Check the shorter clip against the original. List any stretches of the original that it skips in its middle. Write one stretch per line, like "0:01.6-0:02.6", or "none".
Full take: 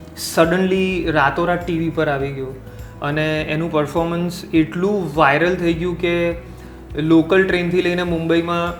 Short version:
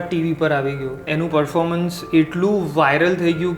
0:02.6-0:03.5